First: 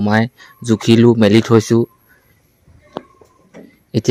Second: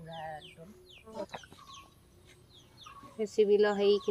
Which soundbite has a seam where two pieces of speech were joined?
second; 1 cut; at 1.2 s

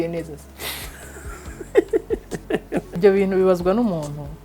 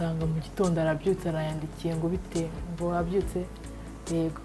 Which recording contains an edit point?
first; 1 cut; at 2.9 s

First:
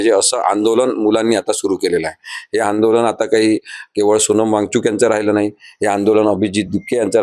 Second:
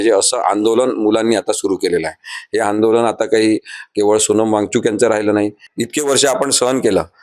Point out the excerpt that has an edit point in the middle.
second; 1 cut; at 5.6 s

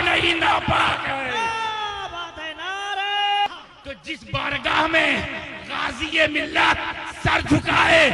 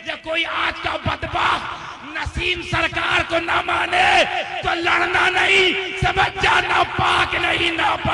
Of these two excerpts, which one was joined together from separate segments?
first; 1 cut; at 3.5 s

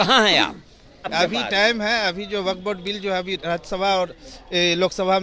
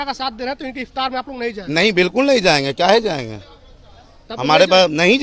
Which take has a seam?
first; 1 cut; at 1.1 s

